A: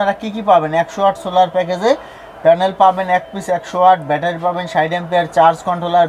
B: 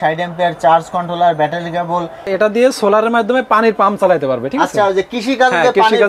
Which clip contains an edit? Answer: B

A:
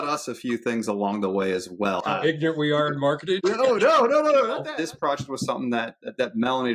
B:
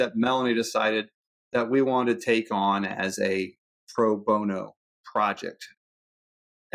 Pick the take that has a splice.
A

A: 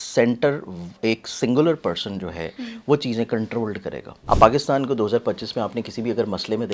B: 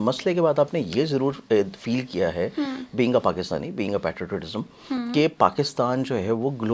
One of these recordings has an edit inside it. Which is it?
A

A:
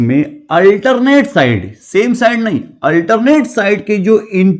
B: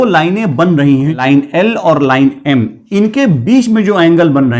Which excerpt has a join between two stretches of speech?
B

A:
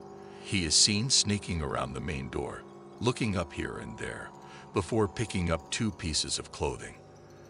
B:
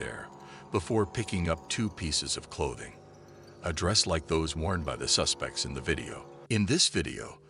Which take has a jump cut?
B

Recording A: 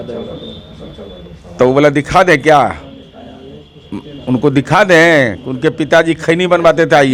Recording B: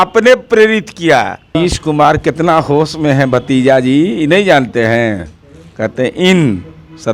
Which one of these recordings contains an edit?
B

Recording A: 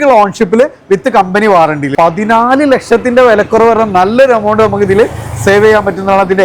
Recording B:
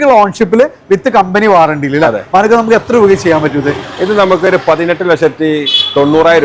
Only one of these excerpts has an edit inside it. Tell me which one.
A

